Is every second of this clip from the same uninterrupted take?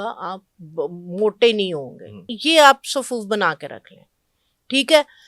no; 1 cut; at 2.4 s

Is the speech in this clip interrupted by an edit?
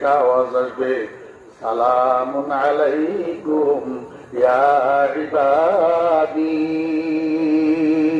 no; 0 cuts

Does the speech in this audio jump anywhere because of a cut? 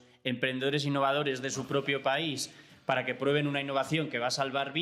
no; 0 cuts

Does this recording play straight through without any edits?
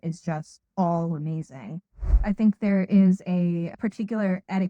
no; 1 cut; at 2.2 s

